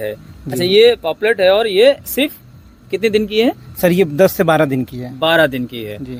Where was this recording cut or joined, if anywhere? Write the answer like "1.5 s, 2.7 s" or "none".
none